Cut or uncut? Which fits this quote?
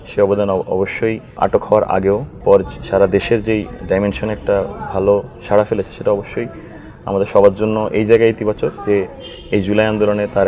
cut